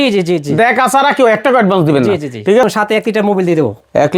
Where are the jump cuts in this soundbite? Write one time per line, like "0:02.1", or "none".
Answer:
0:02.6